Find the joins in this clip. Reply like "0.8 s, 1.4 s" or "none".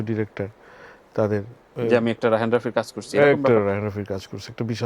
1.6 s